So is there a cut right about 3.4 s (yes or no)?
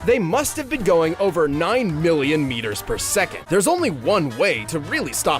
yes